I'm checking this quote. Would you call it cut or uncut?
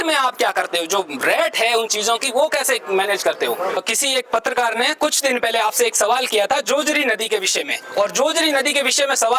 cut